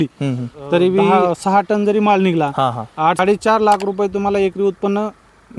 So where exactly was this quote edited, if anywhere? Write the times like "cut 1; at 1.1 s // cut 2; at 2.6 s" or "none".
cut 1; at 1.1 s // cut 2; at 3.2 s